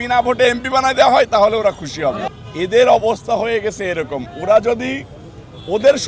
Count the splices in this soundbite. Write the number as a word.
one